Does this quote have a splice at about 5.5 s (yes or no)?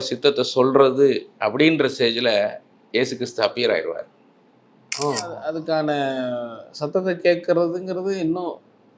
yes